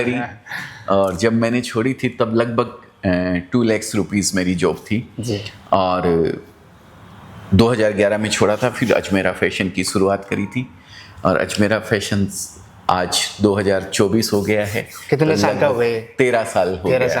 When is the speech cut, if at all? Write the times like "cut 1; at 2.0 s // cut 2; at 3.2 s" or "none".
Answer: none